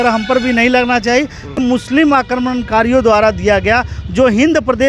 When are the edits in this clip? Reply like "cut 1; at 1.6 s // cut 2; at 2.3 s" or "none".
cut 1; at 1.6 s